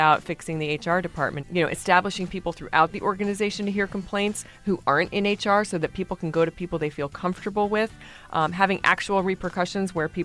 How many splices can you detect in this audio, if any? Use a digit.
1